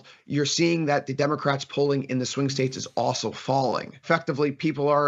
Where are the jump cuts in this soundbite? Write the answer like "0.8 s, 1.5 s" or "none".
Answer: 4.0 s